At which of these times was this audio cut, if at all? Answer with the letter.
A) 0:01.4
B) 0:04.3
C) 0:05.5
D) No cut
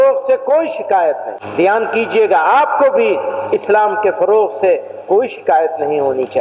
A